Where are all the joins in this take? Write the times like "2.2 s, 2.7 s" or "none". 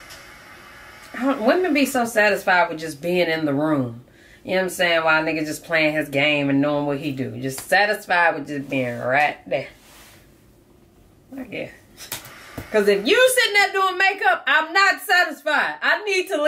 none